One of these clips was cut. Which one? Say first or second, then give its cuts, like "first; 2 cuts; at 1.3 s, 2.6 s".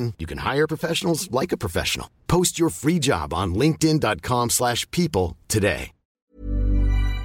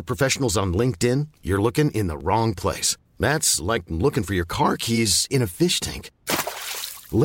first; 1 cut; at 6.2 s